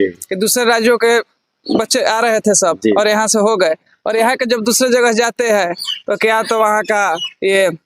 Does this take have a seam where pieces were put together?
no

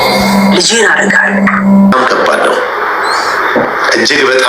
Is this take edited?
yes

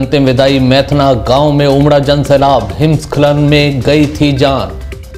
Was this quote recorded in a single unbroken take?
yes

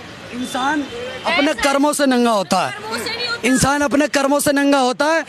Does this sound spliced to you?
no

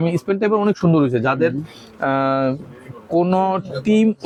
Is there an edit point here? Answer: no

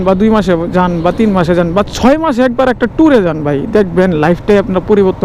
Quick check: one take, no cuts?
yes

